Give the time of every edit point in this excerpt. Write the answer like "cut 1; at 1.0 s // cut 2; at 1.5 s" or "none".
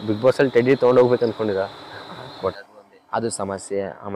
cut 1; at 2.6 s